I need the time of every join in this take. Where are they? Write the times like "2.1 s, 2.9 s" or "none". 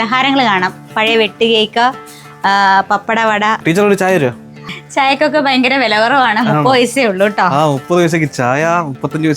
3.6 s, 4.7 s